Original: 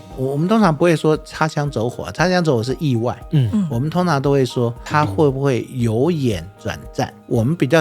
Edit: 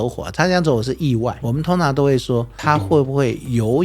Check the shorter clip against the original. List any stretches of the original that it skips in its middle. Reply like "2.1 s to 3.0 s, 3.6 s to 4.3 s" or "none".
3.2 s to 3.7 s